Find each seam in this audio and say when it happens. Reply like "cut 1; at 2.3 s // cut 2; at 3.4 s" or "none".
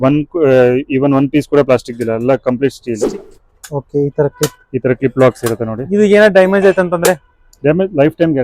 cut 1; at 3.1 s